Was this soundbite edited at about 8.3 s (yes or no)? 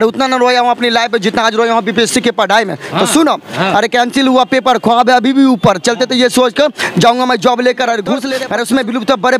yes